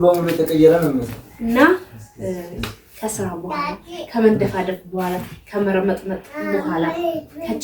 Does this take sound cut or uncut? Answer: cut